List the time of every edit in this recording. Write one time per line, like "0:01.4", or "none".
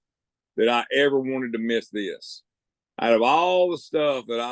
none